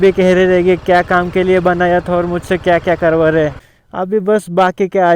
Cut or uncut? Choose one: uncut